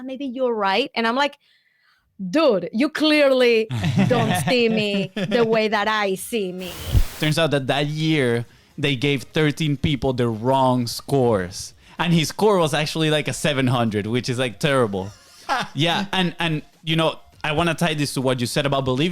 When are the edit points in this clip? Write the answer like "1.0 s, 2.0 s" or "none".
6.9 s